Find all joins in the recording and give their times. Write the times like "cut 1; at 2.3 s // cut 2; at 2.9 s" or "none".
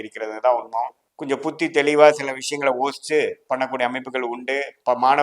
cut 1; at 1.1 s

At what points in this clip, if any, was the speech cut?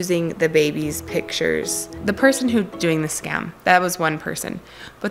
cut 1; at 1.9 s // cut 2; at 2.7 s

